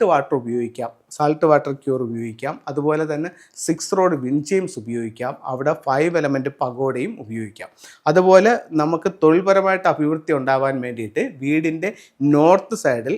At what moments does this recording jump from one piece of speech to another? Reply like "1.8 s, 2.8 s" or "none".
none